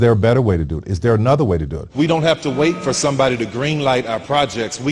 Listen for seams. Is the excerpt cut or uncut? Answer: cut